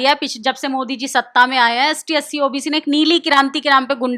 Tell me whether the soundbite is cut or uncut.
uncut